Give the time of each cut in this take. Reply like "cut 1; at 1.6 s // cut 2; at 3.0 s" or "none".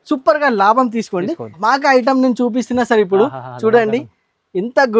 cut 1; at 1.5 s